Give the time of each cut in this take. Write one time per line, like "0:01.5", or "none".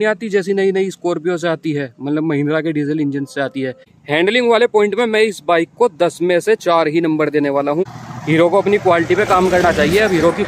0:03.9
0:07.8